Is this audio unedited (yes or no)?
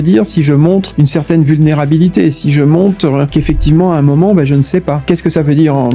no